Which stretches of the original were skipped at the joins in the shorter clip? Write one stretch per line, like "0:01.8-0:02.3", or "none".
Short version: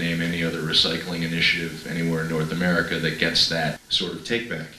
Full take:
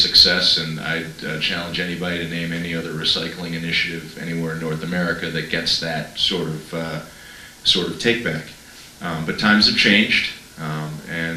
0:06.2-0:07.6

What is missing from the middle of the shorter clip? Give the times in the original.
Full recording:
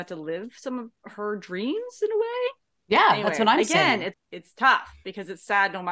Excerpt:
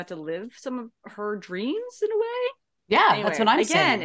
none

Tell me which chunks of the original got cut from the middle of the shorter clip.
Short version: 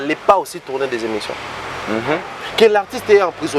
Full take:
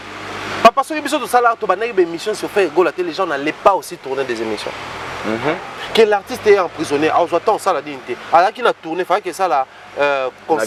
none

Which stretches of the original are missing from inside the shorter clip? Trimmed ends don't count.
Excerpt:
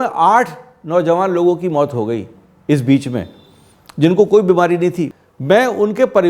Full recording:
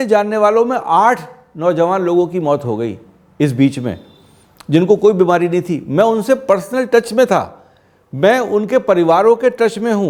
0:05.8-0:07.8

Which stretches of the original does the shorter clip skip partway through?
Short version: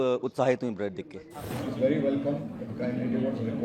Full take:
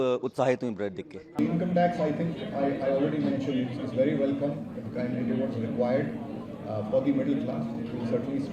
0:01.4-0:03.5

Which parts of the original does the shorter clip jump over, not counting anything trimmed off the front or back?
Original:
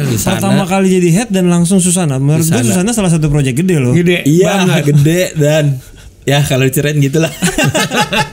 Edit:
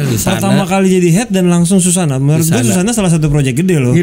none

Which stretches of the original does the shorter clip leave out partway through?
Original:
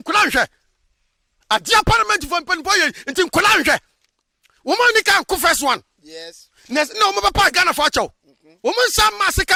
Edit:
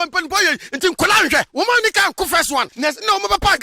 0:03.8-0:04.6
0:05.8-0:06.6

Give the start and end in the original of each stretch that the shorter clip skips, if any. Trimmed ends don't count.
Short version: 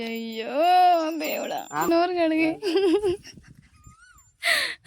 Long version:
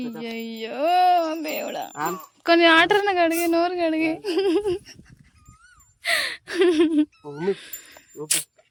0:02.1-0:03.5

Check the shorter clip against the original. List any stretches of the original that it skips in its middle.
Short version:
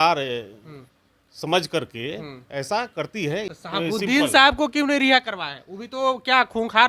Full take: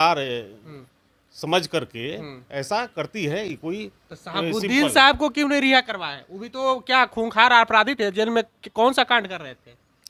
0:03.5-0:04.2

